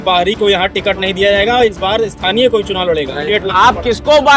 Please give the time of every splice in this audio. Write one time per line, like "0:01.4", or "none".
0:03.2